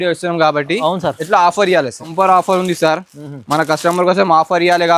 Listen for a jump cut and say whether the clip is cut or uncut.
cut